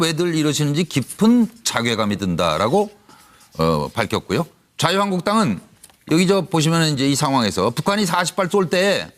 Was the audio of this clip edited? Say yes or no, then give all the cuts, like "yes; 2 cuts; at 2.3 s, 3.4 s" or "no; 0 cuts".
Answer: no; 0 cuts